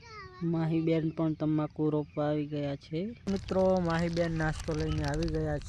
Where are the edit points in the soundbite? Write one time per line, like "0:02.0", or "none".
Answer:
0:03.3